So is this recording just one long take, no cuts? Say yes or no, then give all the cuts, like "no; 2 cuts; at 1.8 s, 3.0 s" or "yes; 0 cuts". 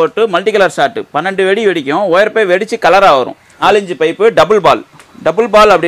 no; 1 cut; at 3.4 s